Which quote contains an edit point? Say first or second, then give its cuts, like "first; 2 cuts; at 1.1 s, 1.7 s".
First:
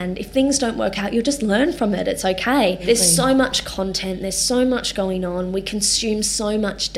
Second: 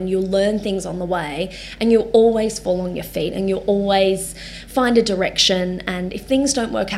first; 1 cut; at 2.8 s